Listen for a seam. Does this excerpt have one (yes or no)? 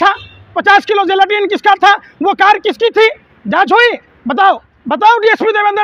yes